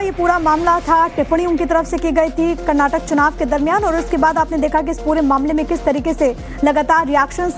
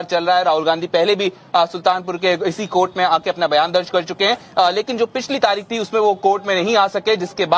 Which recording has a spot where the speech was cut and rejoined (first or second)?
first